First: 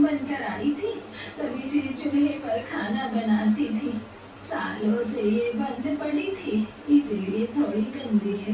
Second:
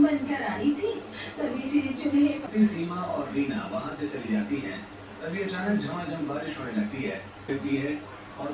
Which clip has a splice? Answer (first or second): second